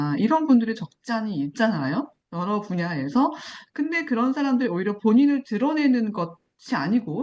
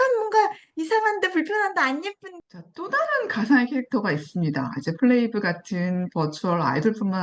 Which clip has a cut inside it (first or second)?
second